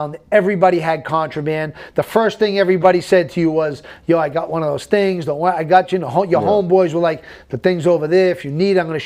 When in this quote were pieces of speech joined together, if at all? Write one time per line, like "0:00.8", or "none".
none